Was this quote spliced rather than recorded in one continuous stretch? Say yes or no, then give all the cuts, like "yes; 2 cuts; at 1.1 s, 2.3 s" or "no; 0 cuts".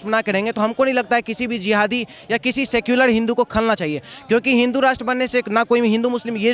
no; 0 cuts